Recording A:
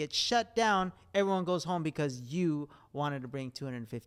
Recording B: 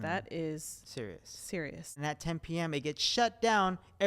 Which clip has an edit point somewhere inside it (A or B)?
B